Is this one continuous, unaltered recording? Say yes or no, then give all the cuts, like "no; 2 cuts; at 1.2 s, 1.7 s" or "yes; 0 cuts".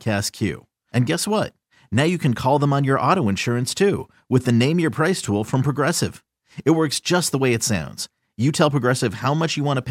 yes; 0 cuts